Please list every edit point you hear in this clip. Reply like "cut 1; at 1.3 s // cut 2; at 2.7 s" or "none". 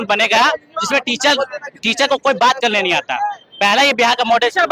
none